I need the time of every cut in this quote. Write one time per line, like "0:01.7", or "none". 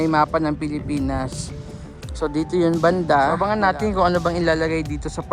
0:03.4